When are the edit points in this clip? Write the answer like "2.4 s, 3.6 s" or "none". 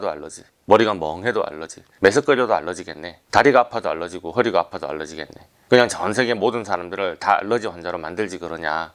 3.3 s

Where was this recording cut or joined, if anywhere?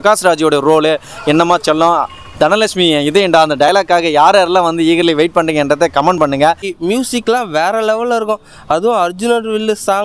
none

